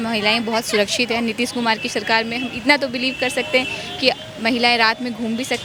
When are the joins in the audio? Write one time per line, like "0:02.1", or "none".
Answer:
none